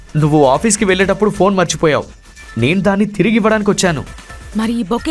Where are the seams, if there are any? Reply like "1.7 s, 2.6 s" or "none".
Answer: none